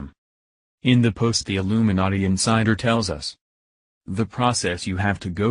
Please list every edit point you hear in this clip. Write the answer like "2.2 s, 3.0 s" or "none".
1.2 s

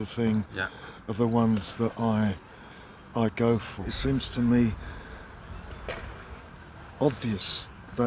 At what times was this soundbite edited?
3.9 s

